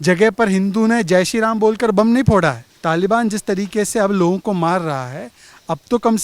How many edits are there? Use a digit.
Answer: 1